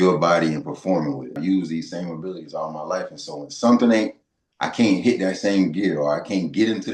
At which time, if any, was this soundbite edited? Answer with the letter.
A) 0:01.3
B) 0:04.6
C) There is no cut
A